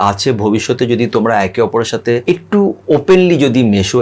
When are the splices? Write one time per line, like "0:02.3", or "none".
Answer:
0:02.2